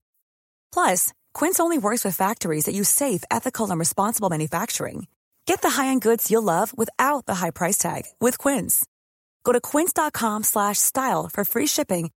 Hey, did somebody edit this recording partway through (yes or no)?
no